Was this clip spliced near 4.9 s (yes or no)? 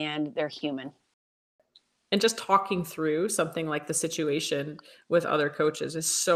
no